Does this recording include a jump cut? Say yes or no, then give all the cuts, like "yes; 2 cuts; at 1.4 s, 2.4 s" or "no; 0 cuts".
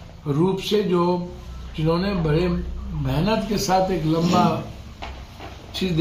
no; 0 cuts